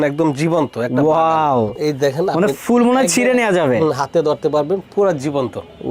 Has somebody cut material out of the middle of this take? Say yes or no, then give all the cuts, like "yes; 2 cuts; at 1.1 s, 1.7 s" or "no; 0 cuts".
no; 0 cuts